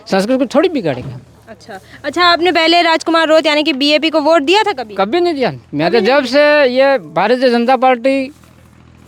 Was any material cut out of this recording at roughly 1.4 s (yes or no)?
no